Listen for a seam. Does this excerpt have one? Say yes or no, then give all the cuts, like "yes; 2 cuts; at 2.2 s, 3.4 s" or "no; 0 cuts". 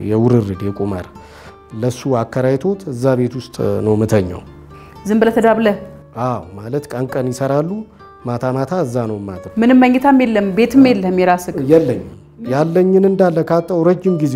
no; 0 cuts